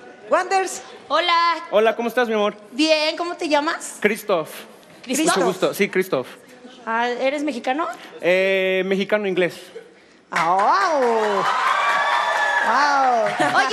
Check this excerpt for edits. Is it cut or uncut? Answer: uncut